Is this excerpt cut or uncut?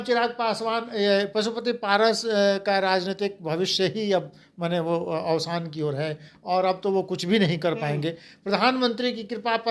uncut